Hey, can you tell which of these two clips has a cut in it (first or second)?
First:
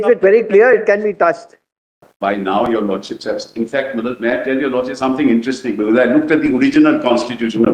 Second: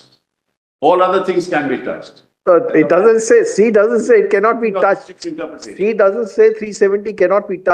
first